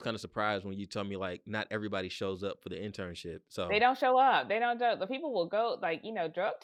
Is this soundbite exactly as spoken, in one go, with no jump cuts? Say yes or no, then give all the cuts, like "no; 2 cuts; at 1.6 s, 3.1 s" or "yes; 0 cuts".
yes; 0 cuts